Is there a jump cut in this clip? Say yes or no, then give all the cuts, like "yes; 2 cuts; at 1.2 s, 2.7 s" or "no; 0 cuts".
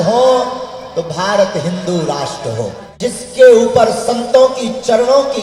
yes; 1 cut; at 2.8 s